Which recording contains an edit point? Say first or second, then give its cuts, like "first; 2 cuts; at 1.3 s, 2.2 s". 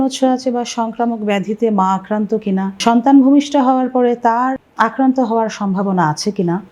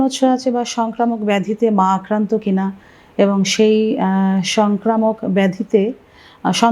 first; 2 cuts; at 2.8 s, 4.7 s